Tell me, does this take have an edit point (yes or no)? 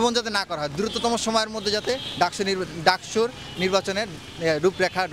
no